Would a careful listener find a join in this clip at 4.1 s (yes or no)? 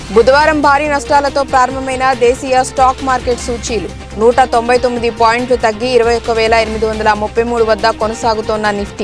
no